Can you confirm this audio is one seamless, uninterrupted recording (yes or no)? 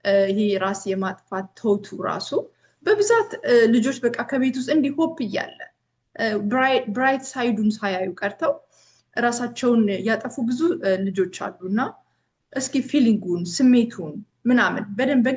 yes